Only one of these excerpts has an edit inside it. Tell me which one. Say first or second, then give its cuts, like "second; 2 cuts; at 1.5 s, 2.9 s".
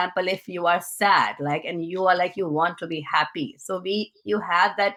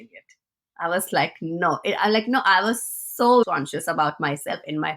second; 1 cut; at 3.4 s